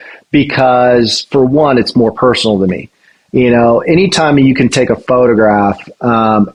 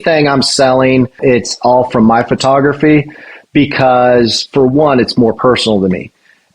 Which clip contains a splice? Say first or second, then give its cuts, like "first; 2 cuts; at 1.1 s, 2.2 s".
second; 1 cut; at 1.2 s